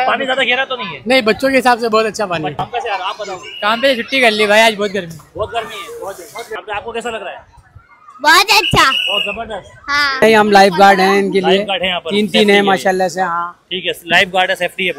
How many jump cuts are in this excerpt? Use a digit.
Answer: 3